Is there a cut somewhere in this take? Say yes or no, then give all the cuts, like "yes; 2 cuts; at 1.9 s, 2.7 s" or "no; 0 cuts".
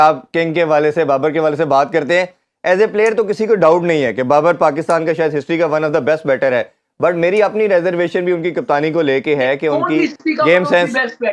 no; 0 cuts